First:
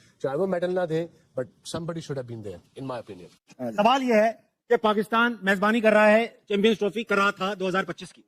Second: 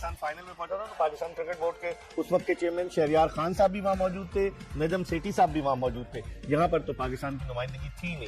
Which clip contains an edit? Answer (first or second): second